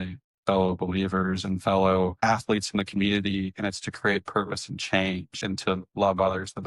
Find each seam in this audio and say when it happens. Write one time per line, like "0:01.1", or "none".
0:05.3